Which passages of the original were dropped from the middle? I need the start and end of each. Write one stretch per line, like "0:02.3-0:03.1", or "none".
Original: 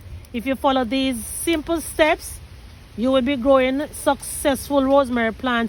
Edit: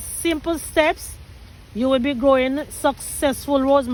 none